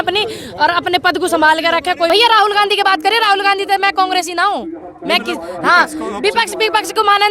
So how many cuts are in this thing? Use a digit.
1